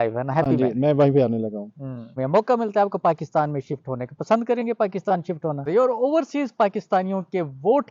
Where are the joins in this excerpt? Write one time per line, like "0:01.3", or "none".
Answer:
0:02.2
0:05.6